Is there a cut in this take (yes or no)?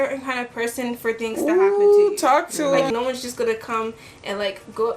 yes